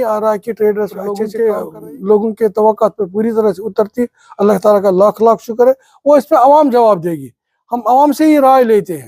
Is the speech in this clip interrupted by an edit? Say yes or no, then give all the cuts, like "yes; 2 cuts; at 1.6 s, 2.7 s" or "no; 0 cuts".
no; 0 cuts